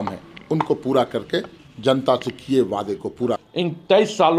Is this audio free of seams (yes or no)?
no